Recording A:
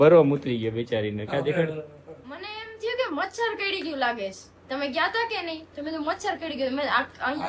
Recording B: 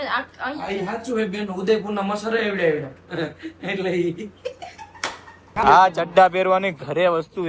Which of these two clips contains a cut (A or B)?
B